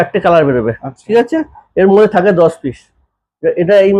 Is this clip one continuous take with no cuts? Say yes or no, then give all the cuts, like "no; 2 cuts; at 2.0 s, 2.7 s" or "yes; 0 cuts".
yes; 0 cuts